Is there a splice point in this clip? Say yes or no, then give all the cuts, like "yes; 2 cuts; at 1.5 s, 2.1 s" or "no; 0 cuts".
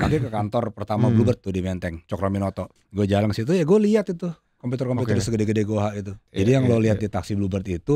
yes; 2 cuts; at 2.7 s, 6.3 s